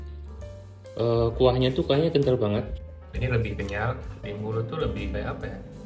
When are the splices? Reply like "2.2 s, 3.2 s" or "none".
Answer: 2.7 s, 4.1 s